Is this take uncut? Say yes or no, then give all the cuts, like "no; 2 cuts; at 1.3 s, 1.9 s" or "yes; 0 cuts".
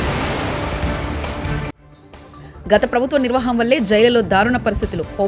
yes; 0 cuts